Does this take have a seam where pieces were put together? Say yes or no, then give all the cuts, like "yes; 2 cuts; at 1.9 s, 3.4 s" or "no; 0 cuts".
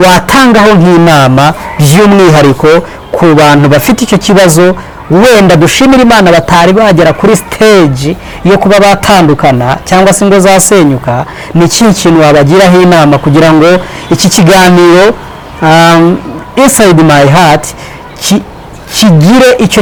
no; 0 cuts